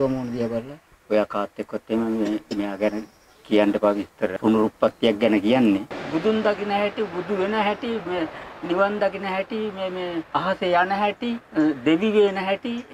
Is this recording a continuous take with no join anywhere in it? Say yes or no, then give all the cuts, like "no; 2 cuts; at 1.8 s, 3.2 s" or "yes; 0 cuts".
no; 4 cuts; at 4.3 s, 6.0 s, 10.3 s, 11.4 s